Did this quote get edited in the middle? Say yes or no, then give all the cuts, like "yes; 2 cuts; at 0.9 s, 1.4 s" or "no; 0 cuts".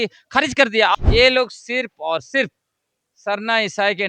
yes; 1 cut; at 0.9 s